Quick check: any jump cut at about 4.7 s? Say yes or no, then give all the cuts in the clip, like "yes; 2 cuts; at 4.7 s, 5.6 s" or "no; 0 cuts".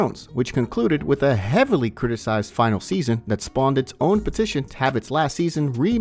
no; 0 cuts